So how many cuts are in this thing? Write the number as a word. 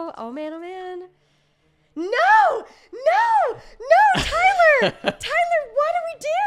zero